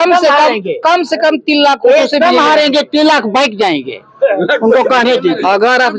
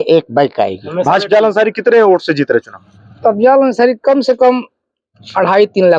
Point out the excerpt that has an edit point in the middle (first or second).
second